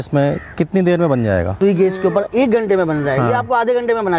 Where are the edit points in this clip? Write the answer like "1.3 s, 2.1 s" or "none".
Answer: 1.5 s